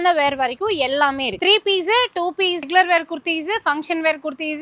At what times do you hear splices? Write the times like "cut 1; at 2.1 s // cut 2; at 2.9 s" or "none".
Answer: cut 1; at 1.4 s // cut 2; at 2.7 s